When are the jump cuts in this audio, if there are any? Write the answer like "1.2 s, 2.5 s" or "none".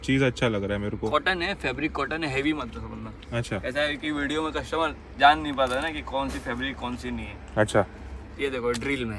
none